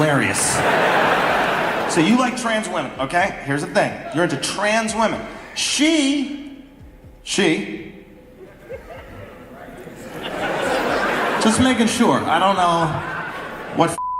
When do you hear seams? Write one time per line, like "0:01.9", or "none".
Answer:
0:01.8